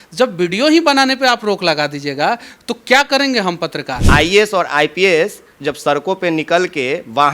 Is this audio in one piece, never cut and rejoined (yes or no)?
no